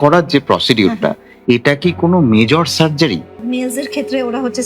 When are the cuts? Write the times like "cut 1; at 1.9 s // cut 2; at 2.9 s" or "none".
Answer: cut 1; at 1.3 s // cut 2; at 3.3 s